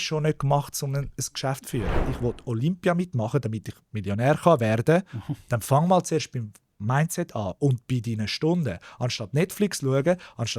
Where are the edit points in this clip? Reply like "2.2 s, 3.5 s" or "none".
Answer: 2.0 s